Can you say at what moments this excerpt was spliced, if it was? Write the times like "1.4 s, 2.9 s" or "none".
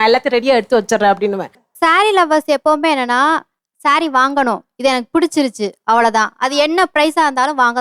1.5 s